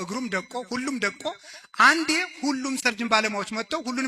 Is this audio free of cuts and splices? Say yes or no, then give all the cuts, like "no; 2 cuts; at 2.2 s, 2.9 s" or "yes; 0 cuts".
no; 1 cut; at 2.8 s